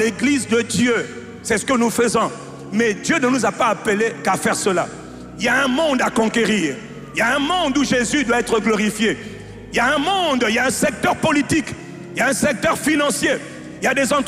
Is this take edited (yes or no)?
no